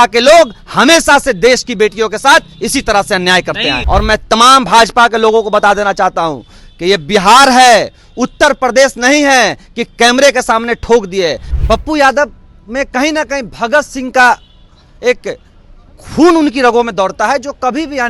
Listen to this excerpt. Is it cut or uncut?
cut